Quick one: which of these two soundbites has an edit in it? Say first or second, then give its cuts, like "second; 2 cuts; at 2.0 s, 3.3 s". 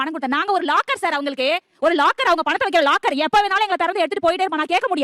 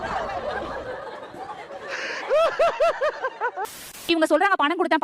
second; 1 cut; at 4.0 s